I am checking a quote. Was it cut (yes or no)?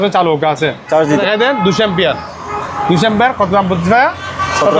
yes